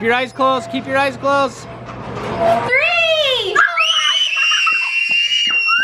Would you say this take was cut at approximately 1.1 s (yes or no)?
no